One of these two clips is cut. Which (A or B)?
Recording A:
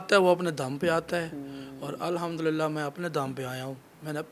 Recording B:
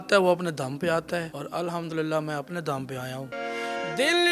B